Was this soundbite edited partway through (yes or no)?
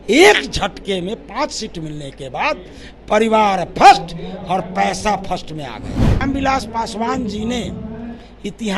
yes